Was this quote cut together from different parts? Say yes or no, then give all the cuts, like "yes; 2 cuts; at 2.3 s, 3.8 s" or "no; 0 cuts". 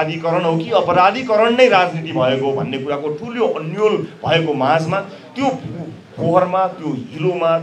no; 0 cuts